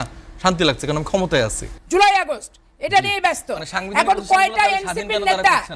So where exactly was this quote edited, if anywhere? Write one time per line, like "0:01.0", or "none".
none